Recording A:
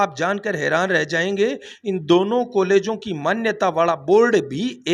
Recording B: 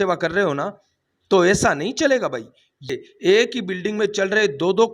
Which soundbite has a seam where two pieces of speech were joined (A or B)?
B